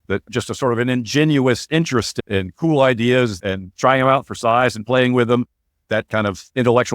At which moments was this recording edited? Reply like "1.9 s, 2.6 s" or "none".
3.4 s